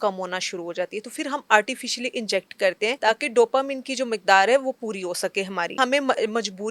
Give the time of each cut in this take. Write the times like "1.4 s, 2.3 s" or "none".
3.0 s, 5.8 s